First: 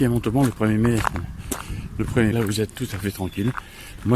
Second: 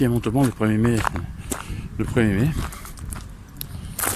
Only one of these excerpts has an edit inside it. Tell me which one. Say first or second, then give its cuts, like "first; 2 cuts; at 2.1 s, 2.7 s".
first; 1 cut; at 2.3 s